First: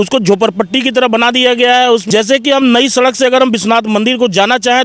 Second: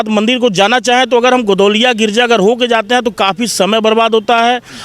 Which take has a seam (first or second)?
first